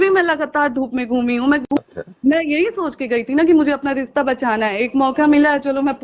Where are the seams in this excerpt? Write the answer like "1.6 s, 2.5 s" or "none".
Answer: 1.6 s